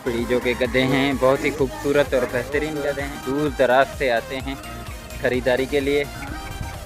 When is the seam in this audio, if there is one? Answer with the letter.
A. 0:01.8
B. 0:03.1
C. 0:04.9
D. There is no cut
B